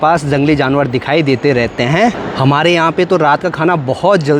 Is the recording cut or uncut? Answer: cut